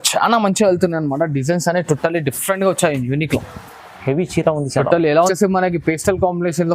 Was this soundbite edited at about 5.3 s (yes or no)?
yes